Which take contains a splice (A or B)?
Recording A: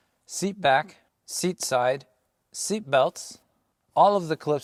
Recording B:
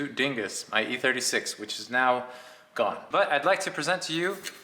B